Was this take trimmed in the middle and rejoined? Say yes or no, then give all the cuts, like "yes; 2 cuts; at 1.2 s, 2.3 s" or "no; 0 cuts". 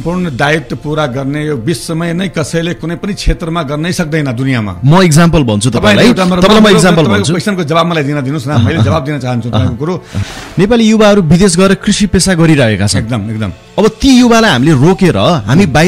yes; 1 cut; at 10.2 s